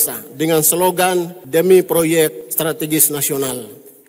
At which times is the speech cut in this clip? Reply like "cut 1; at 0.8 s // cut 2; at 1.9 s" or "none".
cut 1; at 1.4 s // cut 2; at 2.4 s